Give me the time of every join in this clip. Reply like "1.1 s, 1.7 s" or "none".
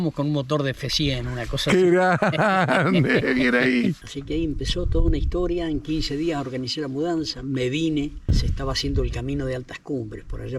4.1 s, 8.3 s

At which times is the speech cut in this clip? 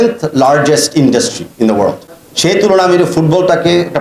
2.0 s

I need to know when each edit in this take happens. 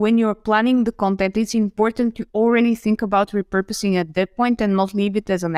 none

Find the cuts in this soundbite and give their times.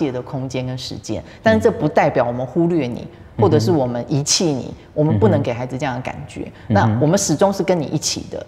none

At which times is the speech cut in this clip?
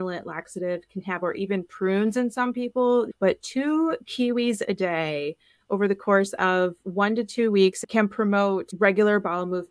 7.8 s

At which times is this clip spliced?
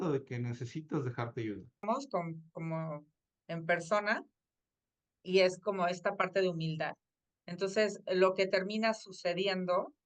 1.8 s

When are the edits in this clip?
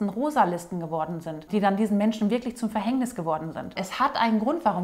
1.5 s, 3.8 s

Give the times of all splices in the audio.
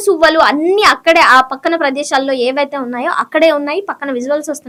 none

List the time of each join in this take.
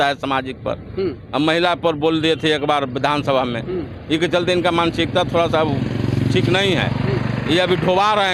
none

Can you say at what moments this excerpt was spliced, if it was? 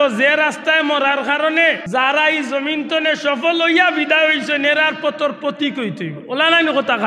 1.8 s

